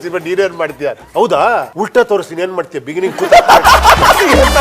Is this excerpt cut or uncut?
cut